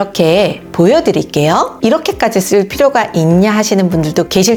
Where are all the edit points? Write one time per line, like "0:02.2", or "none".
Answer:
none